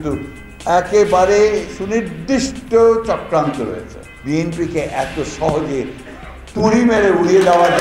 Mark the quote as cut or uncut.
uncut